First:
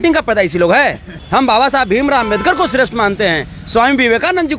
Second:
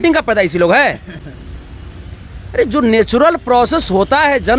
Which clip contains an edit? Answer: first; 1 cut; at 1.1 s

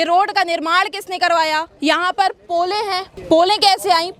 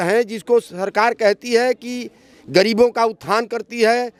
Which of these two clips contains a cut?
first; 2 cuts; at 1.7 s, 3.1 s

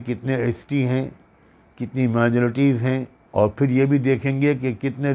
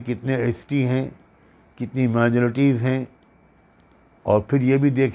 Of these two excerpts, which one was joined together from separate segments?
first; 1 cut; at 3.2 s

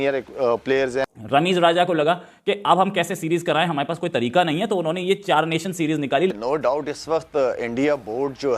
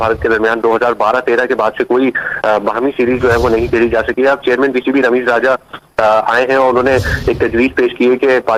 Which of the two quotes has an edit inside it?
first; 2 cuts; at 1.1 s, 6.3 s

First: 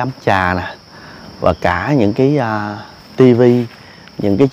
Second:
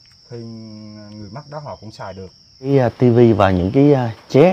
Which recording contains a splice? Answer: second; 1 cut; at 2.7 s

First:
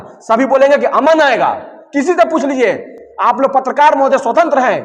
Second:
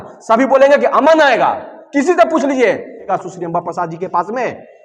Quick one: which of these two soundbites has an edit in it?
second; 1 cut; at 3.1 s

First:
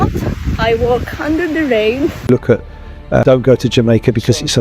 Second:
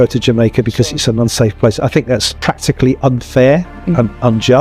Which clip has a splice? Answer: first; 1 cut; at 2.2 s

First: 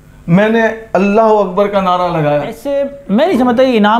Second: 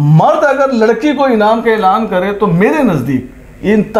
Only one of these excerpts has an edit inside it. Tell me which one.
first; 1 cut; at 2.6 s

